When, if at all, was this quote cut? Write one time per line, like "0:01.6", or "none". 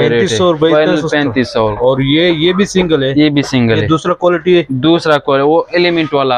none